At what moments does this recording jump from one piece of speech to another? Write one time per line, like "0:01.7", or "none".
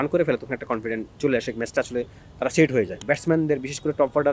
0:03.0